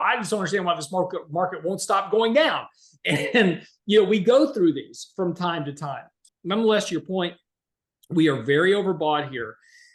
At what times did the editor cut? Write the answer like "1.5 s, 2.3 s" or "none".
6.3 s

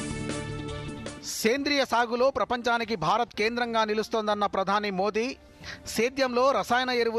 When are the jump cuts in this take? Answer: none

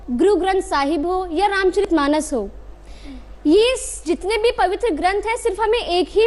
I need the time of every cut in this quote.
none

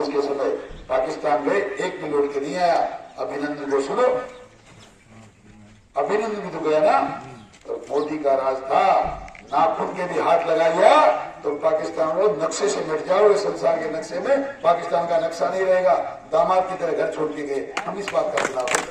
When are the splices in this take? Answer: none

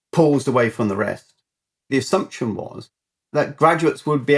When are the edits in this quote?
1.9 s

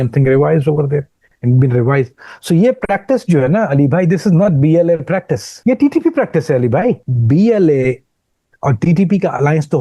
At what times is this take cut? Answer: 5.4 s, 7.1 s

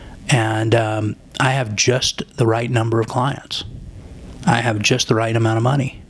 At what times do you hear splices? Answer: none

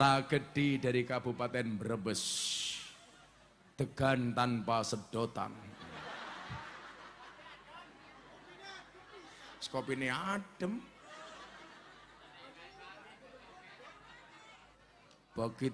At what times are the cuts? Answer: 14.7 s

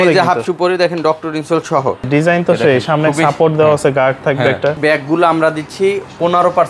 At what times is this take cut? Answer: 2.1 s, 4.8 s

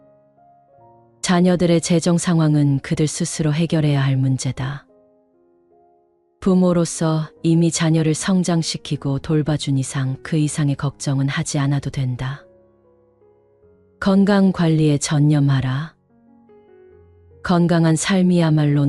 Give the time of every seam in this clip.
16.0 s, 17.4 s

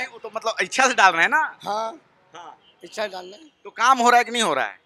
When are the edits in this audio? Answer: none

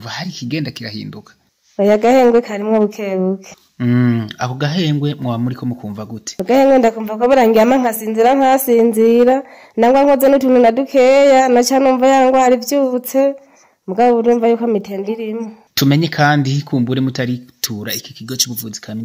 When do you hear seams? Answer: none

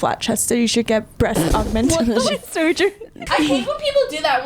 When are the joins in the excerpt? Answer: 1.2 s, 3.2 s

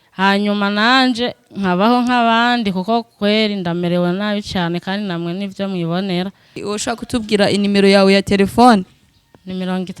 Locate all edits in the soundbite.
6.6 s

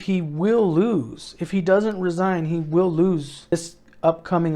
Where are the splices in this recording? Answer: 3.5 s

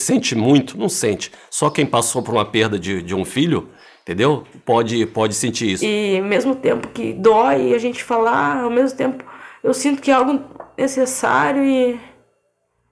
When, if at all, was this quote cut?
5.8 s

